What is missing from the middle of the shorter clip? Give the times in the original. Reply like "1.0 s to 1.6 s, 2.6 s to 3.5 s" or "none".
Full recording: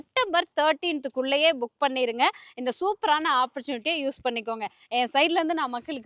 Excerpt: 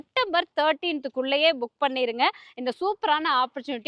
none